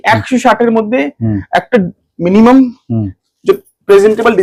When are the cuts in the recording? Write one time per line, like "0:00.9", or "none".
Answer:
none